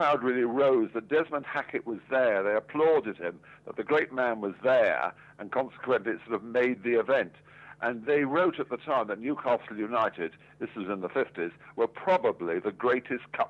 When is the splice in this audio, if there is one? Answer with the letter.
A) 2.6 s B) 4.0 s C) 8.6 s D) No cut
D